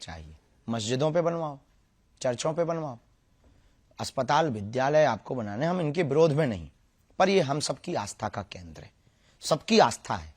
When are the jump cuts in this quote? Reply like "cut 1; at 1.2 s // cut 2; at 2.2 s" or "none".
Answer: none